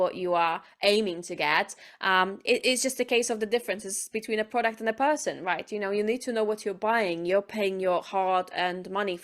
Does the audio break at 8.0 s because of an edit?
no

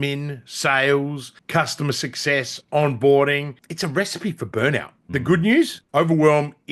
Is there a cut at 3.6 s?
yes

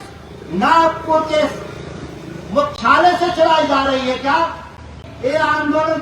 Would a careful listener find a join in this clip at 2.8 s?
no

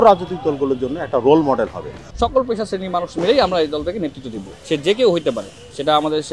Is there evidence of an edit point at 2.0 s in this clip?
yes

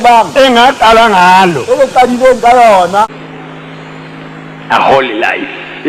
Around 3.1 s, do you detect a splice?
yes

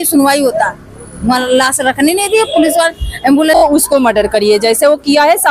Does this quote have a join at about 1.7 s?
no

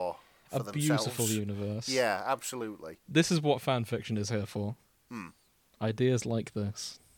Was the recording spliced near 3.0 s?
yes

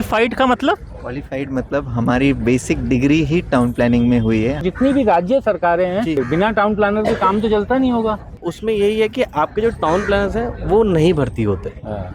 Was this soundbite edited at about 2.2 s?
no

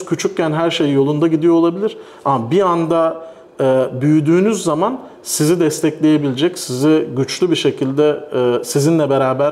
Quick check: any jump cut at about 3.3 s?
no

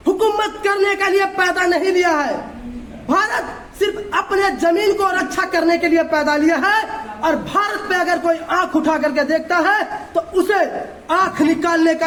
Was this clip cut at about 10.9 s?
no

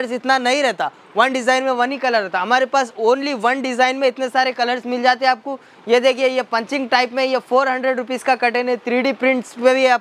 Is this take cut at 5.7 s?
no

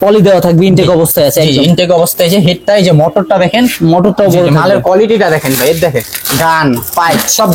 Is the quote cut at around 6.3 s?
no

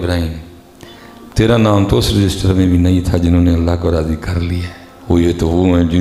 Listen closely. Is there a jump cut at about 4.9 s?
no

